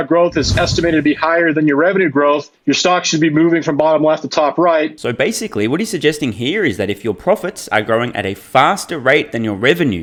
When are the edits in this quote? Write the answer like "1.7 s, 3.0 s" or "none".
none